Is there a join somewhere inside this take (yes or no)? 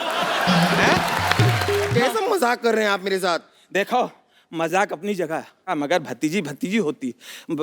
yes